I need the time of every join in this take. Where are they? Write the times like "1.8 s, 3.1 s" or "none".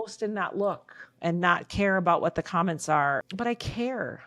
3.2 s